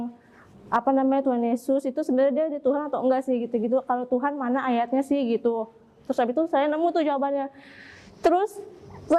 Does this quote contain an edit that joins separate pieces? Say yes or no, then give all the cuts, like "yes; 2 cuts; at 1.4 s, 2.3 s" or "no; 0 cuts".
no; 0 cuts